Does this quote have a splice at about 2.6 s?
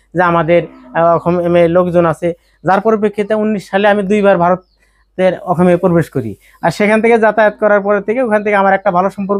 no; 0 cuts

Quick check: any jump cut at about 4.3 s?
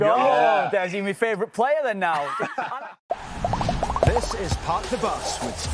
no; 1 cut; at 2.6 s

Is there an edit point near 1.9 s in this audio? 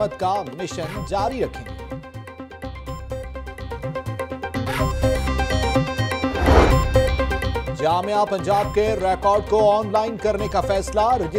no; 1 cut; at 7.0 s

